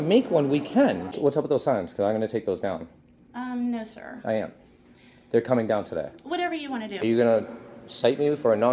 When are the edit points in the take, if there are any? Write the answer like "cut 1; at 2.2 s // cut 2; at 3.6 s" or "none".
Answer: cut 1; at 1.1 s // cut 2; at 7.0 s